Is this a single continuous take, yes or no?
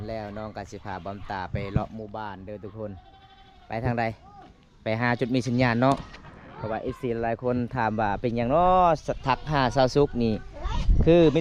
yes